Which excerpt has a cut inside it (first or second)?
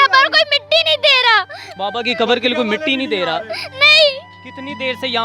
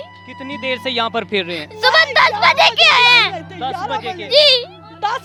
first